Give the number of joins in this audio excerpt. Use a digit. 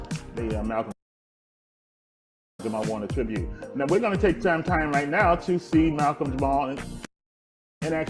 0